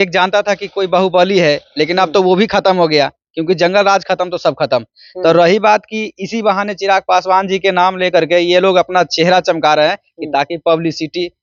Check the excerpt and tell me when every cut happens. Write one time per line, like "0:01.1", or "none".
none

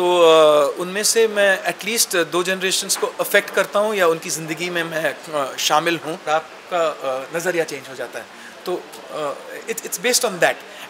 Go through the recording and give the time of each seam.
0:06.3

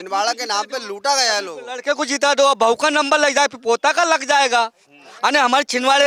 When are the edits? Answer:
none

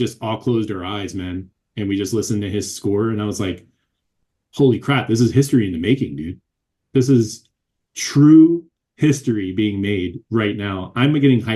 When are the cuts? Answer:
none

